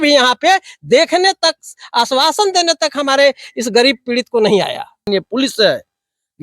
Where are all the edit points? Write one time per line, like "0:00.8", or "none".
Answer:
0:05.1